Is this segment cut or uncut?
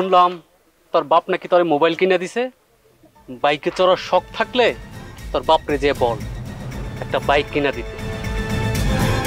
uncut